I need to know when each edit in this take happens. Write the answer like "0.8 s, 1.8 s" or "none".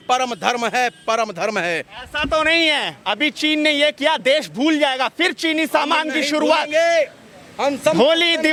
none